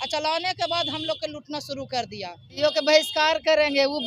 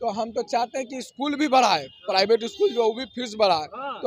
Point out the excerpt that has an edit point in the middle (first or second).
first